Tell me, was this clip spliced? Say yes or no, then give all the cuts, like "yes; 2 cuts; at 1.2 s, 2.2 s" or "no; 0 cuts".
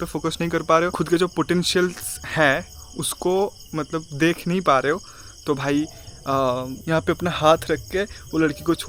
yes; 2 cuts; at 0.9 s, 6.8 s